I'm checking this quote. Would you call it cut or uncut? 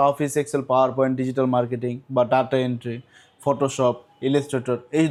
uncut